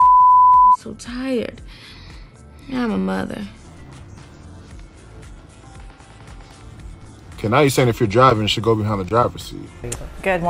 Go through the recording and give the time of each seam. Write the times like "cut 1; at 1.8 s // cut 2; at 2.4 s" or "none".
none